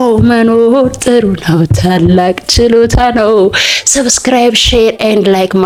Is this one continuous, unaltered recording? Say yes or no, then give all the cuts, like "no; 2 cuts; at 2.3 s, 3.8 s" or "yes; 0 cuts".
yes; 0 cuts